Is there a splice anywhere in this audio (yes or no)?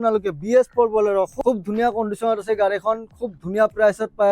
yes